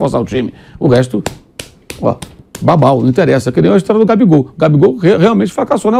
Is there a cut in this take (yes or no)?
no